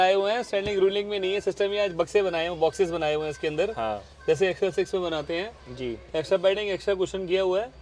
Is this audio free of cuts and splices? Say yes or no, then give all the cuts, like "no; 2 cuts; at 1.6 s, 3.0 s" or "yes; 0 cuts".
yes; 0 cuts